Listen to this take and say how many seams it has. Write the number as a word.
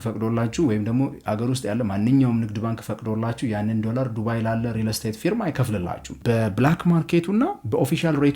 one